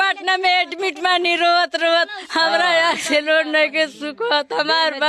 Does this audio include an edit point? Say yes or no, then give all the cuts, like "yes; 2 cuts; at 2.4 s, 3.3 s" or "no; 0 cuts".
no; 0 cuts